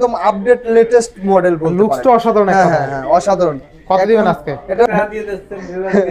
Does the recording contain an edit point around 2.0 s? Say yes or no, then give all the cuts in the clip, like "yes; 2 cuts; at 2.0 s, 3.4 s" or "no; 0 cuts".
no; 1 cut; at 4.7 s